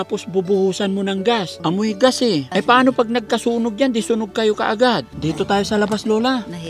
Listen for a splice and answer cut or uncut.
cut